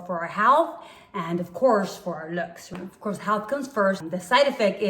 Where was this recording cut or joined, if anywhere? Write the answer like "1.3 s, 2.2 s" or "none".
2.7 s, 4.0 s